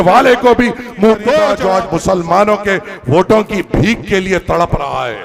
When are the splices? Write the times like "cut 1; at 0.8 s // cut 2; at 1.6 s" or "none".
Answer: cut 1; at 1.6 s